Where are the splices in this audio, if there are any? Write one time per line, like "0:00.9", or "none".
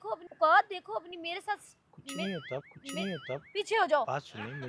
none